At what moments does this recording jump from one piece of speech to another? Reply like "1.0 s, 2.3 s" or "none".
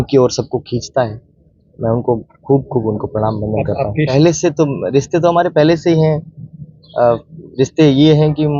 4.1 s